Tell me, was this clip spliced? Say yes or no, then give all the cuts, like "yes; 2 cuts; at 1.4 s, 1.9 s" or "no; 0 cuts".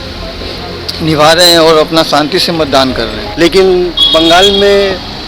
yes; 1 cut; at 3.2 s